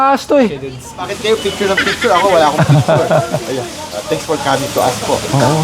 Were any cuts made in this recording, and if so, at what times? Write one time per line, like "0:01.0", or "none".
0:01.0